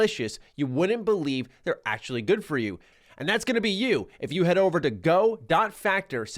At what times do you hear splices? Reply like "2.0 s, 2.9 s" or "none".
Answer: 2.9 s